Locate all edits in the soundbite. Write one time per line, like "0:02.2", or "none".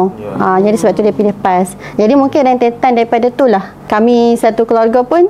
0:03.9